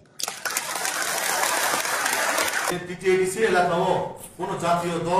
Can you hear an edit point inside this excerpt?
yes; 1 cut; at 2.8 s

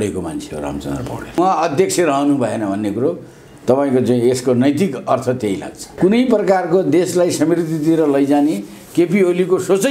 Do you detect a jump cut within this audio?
yes; 2 cuts; at 1.4 s, 5.8 s

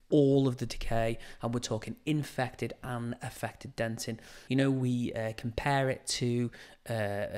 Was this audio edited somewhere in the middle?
yes; 1 cut; at 4.3 s

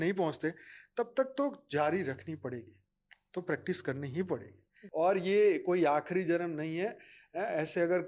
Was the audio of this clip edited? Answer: yes; 1 cut; at 4.8 s

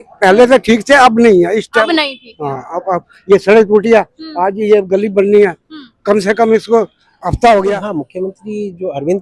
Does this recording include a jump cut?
yes; 1 cut; at 7.8 s

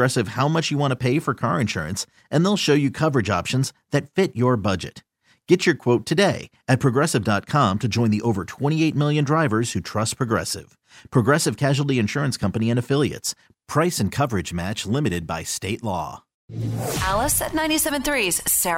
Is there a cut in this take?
yes; 1 cut; at 16.6 s

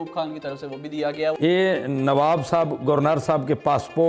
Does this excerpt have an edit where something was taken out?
yes; 1 cut; at 1.4 s

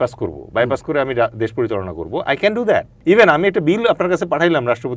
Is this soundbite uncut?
no; 1 cut; at 2.9 s

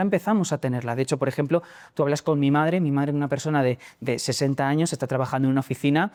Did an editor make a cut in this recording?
no; 0 cuts

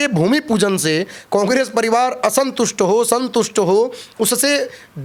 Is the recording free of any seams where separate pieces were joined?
yes; 0 cuts

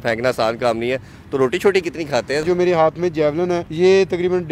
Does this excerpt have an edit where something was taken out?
yes; 2 cuts; at 2.4 s, 3.7 s

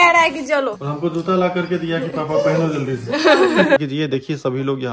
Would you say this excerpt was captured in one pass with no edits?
no; 1 cut; at 3.8 s

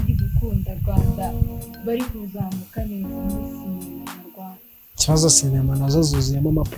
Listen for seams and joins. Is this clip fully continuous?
yes; 0 cuts

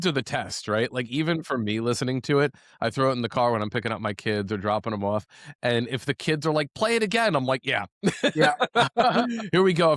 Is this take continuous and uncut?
yes; 0 cuts

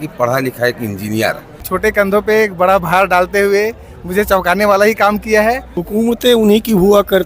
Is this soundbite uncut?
no; 2 cuts; at 1.6 s, 5.7 s

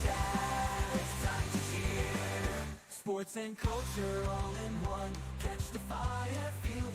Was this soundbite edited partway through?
no; 0 cuts

